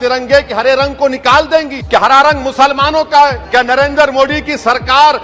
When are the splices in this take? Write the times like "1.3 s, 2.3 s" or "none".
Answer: 1.8 s, 3.4 s